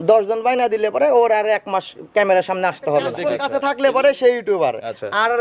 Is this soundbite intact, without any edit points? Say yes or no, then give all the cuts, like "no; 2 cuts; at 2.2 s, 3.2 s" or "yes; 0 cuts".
no; 1 cut; at 3.3 s